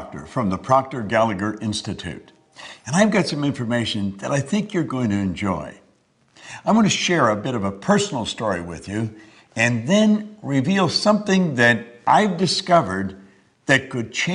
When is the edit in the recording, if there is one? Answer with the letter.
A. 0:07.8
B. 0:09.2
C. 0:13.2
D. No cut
C